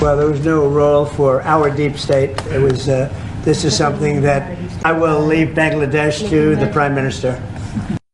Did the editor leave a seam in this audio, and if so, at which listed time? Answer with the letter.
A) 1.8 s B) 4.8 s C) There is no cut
B